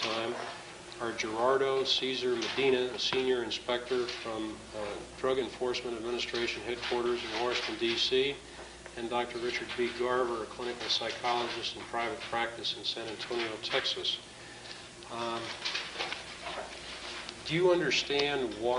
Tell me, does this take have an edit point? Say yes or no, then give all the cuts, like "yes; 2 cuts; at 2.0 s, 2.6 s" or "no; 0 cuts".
yes; 1 cut; at 2.8 s